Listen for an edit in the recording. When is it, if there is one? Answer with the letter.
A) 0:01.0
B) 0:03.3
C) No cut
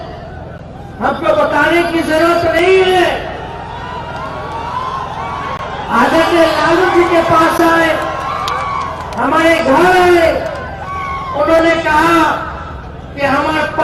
C